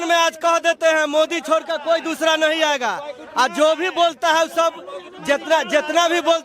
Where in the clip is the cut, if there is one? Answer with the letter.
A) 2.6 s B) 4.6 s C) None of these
C